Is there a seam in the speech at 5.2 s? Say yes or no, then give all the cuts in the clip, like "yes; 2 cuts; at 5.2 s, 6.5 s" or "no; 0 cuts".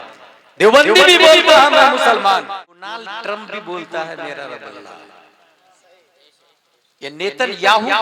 no; 1 cut; at 2.5 s